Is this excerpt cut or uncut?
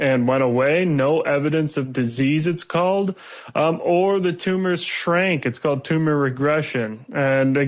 uncut